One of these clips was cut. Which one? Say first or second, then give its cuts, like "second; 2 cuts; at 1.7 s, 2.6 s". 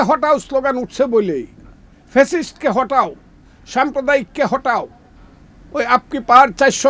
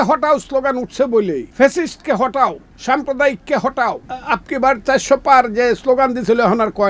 second; 3 cuts; at 1.5 s, 2.7 s, 4.1 s